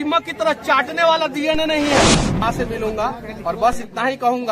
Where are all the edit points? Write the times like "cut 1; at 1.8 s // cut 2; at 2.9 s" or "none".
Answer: cut 1; at 2.4 s

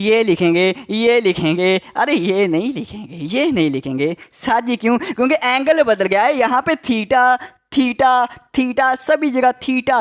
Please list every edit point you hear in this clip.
none

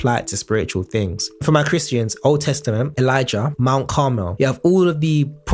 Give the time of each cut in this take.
none

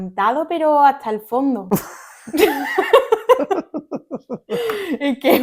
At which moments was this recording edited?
none

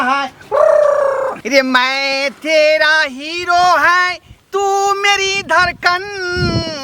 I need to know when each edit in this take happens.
cut 1; at 1.4 s

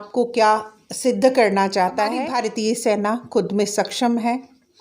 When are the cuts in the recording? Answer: cut 1; at 2.3 s

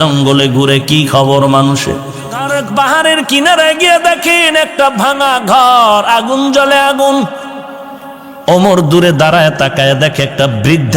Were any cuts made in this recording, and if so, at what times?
cut 1; at 2.5 s

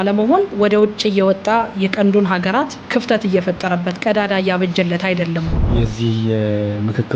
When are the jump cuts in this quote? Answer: cut 1; at 2.8 s // cut 2; at 5.6 s

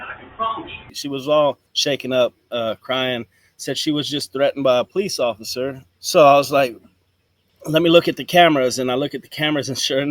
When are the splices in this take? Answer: cut 1; at 1.0 s // cut 2; at 1.7 s

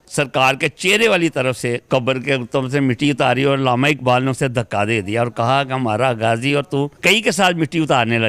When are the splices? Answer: cut 1; at 6.9 s

